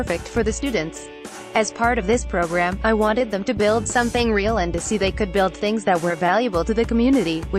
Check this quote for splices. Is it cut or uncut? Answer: cut